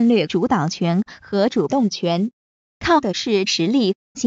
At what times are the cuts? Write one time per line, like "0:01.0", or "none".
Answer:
none